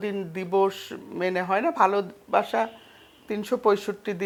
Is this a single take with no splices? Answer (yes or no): yes